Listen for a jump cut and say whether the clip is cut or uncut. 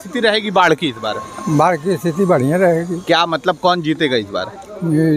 uncut